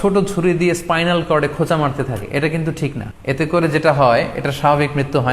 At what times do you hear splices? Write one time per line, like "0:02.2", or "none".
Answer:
0:03.1